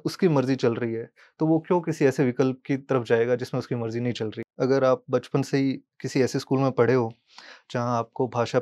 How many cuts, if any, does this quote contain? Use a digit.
1